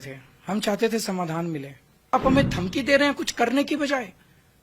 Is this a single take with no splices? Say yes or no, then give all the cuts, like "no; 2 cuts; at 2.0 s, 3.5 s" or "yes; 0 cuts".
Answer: no; 1 cut; at 2.1 s